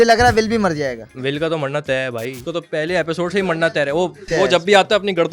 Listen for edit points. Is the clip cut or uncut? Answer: cut